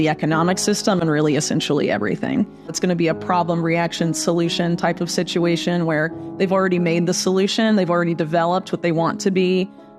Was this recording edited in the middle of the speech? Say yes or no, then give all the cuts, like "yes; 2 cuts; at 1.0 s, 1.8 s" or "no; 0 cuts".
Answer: yes; 1 cut; at 2.8 s